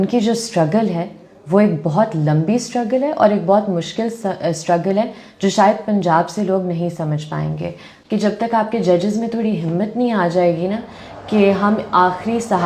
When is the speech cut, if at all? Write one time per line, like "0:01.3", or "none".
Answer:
0:07.9